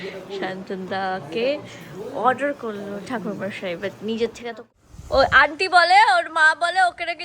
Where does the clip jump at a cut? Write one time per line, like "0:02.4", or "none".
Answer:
0:04.5